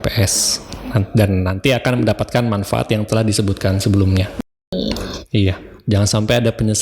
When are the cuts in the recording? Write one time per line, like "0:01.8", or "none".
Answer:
0:04.7